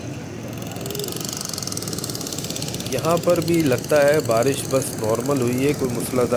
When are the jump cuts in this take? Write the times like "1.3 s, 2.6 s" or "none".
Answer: none